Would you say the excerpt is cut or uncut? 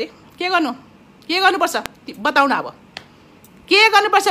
uncut